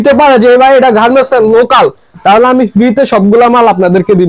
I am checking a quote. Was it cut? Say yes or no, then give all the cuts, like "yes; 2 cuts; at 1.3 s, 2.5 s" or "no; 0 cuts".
no; 0 cuts